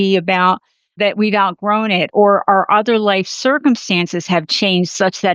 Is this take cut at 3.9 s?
no; 2 cuts; at 1.0 s, 2.1 s

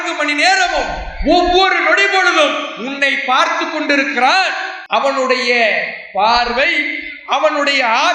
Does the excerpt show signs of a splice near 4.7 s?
yes; 1 cut; at 4.7 s

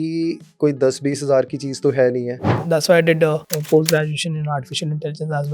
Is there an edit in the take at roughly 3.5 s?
yes; 2 cuts; at 2.5 s, 3.5 s

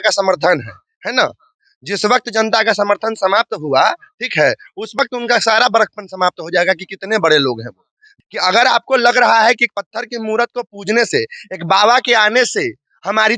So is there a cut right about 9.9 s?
no; 1 cut; at 8.1 s

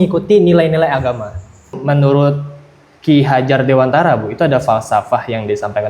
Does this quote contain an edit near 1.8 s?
yes; 1 cut; at 1.8 s

